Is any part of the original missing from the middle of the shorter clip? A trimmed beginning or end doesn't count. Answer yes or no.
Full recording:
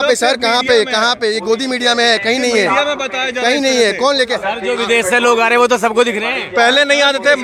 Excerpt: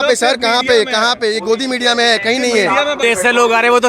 yes